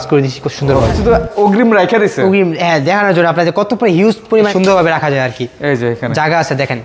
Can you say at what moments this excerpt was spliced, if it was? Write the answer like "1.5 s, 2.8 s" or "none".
1.0 s, 4.5 s